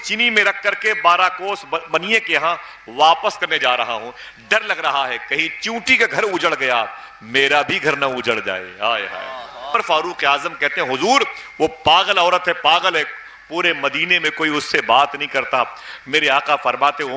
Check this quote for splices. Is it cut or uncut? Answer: cut